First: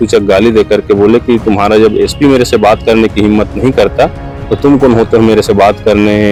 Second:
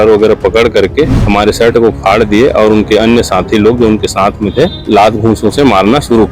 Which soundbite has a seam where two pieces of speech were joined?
second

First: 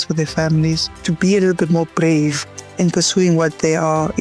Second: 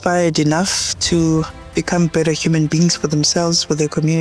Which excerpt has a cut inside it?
first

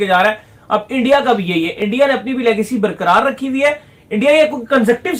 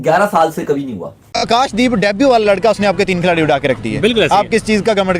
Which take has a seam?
second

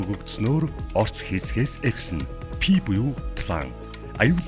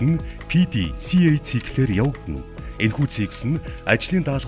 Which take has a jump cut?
first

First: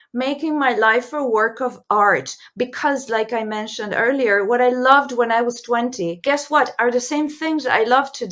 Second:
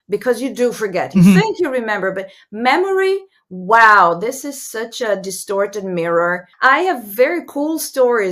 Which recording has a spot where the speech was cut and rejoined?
second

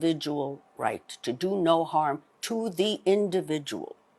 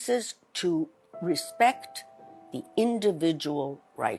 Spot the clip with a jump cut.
second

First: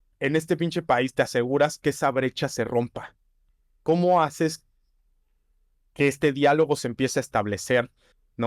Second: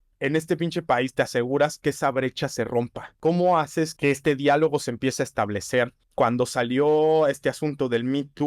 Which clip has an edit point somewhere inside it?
second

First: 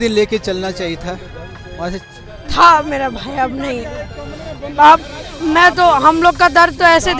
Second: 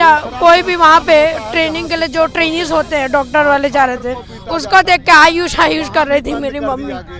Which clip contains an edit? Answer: first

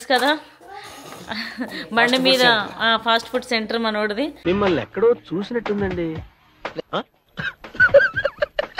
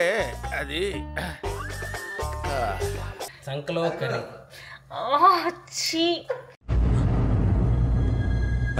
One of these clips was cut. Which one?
second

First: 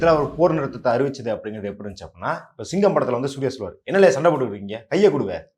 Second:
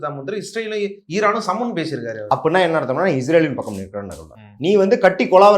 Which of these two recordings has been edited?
second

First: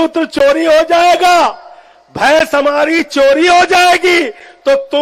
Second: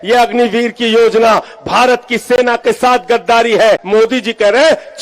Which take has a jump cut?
second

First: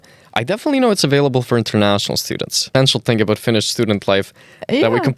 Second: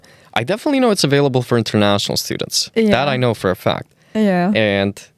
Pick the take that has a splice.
first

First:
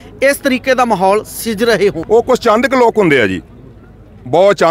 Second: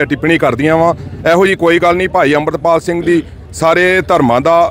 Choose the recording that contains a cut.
first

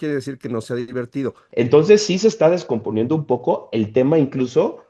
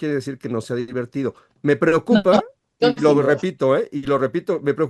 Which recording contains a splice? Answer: first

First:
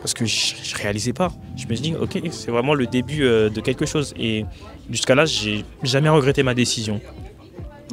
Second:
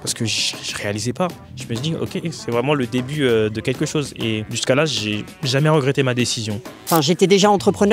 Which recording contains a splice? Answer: second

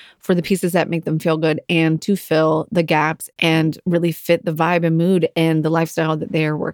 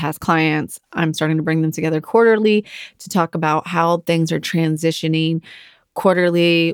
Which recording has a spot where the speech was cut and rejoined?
first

